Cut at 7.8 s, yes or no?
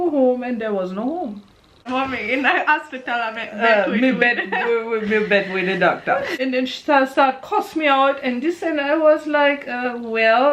no